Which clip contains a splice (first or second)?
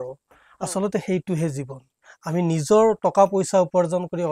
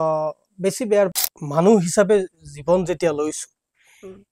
second